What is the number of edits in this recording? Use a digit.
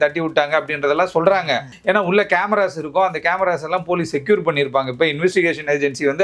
1